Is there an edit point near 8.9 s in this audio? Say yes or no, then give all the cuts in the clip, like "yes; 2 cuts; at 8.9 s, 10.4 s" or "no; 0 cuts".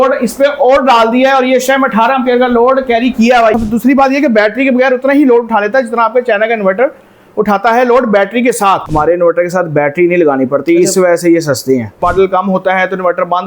yes; 3 cuts; at 3.5 s, 8.9 s, 11.9 s